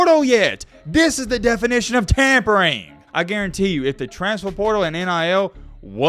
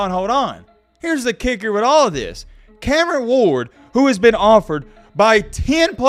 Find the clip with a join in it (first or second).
first